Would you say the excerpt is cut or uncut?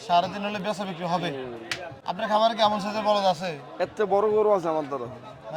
uncut